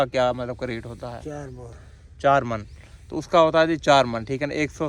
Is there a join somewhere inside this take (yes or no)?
no